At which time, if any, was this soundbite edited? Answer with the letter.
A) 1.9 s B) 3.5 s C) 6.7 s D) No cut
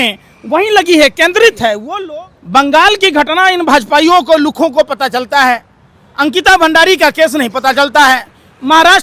A